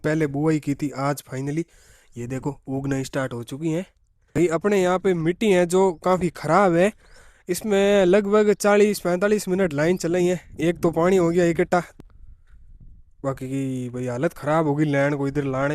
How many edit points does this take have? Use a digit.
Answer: 2